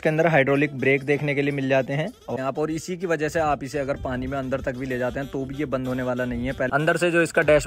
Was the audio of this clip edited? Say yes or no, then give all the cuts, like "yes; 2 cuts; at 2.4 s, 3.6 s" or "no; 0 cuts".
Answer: yes; 2 cuts; at 2.3 s, 6.7 s